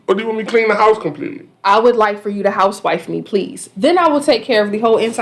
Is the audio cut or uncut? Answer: cut